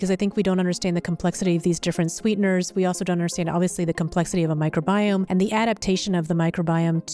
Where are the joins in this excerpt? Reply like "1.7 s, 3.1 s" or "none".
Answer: 5.3 s